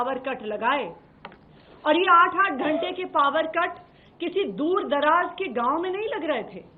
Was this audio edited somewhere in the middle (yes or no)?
no